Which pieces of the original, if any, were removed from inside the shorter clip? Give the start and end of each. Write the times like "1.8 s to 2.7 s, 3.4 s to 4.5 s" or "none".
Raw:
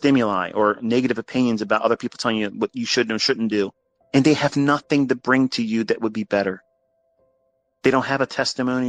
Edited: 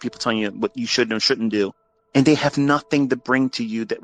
none